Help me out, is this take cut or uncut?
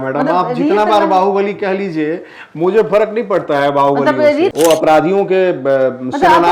cut